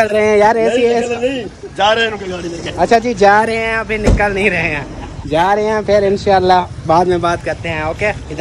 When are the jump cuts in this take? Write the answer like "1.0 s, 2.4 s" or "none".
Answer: none